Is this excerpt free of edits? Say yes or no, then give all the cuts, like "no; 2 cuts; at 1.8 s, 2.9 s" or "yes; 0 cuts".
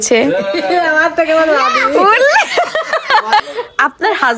no; 1 cut; at 3.4 s